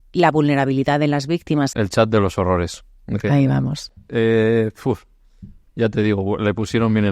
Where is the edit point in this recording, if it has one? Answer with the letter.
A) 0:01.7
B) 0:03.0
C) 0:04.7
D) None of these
A